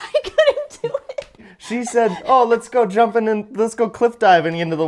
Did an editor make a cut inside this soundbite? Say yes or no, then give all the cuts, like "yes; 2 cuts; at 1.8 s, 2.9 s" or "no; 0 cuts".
yes; 1 cut; at 1.5 s